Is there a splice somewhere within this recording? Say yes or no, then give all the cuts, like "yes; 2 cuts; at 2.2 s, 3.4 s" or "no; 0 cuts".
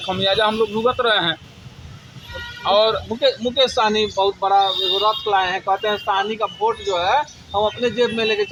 no; 0 cuts